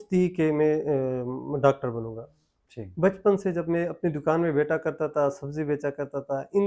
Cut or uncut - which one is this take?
uncut